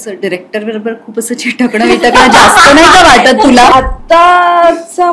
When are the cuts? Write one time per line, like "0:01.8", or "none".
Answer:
0:03.7

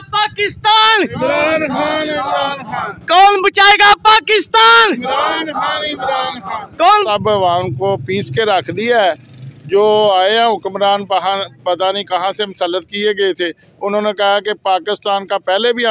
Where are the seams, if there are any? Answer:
0:07.0

